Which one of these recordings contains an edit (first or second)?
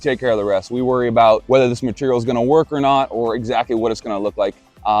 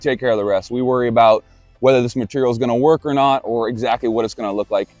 first